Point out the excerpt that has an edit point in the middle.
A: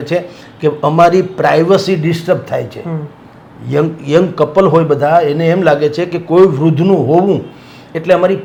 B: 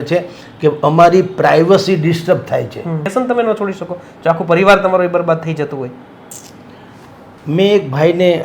B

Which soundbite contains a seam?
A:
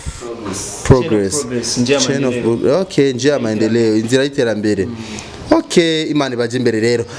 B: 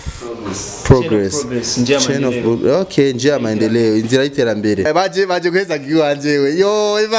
B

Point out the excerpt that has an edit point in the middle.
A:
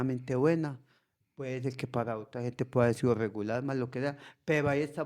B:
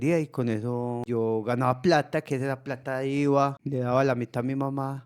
B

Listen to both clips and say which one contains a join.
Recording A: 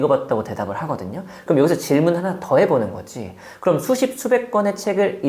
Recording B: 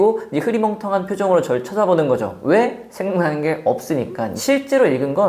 B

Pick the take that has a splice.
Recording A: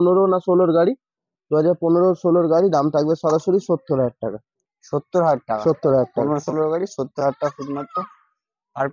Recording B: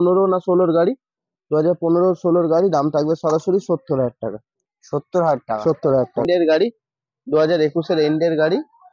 B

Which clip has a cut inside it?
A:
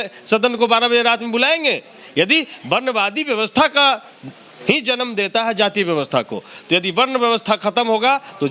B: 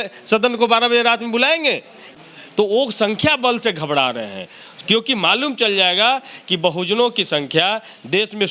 B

